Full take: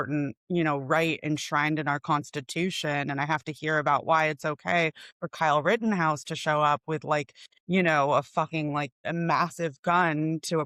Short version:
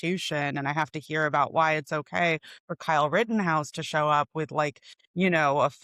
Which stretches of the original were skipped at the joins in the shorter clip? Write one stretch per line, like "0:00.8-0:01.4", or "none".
none